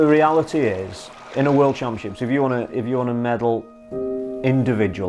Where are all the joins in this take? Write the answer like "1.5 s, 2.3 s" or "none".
1.2 s